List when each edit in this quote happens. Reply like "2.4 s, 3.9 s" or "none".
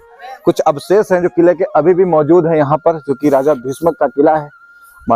none